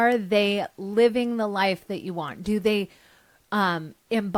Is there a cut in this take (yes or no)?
no